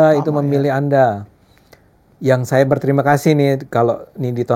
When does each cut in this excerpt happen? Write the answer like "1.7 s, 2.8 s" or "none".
none